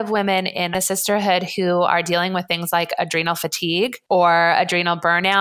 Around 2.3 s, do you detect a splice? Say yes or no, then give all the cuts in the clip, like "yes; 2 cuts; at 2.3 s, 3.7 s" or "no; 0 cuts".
no; 2 cuts; at 0.7 s, 4.0 s